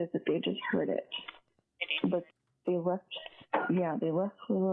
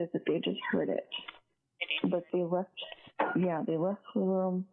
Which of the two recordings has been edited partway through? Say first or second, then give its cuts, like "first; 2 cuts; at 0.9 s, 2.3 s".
second; 1 cut; at 2.3 s